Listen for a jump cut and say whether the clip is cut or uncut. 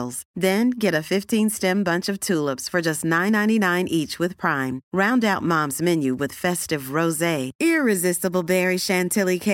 uncut